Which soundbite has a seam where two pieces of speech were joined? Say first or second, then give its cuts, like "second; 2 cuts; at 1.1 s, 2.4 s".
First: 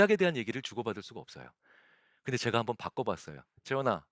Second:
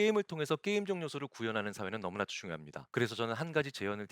second; 1 cut; at 2.7 s